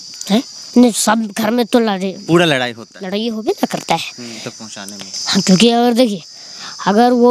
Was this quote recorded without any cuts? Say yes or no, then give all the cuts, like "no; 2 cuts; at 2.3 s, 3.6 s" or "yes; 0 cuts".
no; 1 cut; at 4.5 s